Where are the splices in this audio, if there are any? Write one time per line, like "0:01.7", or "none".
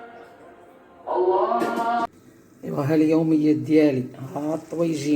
0:02.0